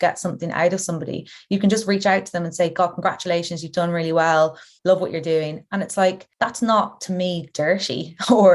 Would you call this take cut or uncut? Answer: cut